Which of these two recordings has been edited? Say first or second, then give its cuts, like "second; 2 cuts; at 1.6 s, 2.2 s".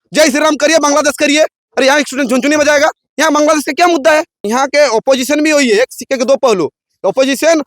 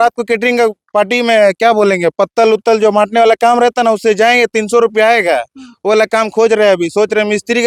first; 2 cuts; at 3.1 s, 4.4 s